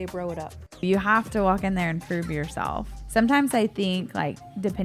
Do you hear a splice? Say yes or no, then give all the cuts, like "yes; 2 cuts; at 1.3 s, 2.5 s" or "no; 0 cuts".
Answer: yes; 2 cuts; at 0.8 s, 2.9 s